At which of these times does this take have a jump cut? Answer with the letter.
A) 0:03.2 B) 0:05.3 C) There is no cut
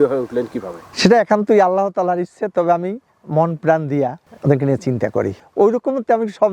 B